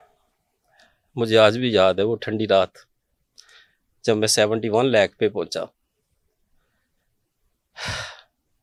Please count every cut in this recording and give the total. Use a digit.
0